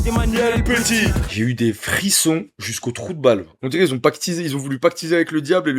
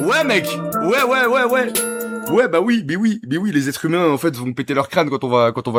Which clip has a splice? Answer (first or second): first